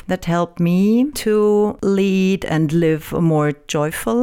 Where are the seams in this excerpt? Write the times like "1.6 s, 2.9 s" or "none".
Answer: none